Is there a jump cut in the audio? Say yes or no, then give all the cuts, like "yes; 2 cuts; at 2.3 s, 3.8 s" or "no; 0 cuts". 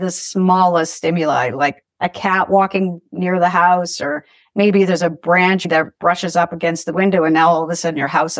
yes; 1 cut; at 5.7 s